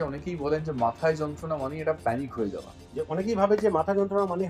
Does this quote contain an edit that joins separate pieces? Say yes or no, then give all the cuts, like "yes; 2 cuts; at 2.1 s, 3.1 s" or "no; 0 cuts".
yes; 1 cut; at 2.8 s